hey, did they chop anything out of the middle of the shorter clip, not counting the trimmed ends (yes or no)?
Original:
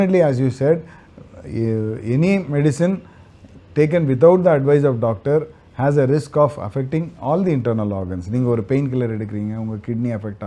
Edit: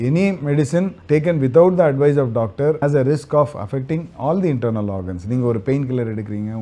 yes